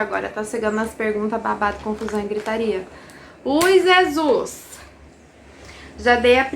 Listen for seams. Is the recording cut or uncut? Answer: uncut